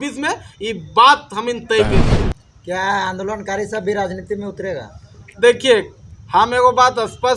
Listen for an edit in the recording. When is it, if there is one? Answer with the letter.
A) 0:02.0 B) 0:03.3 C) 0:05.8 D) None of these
A